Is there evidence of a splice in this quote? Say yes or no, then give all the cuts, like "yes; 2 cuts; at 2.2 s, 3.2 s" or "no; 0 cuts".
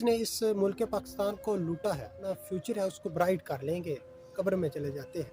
yes; 2 cuts; at 2.3 s, 4.2 s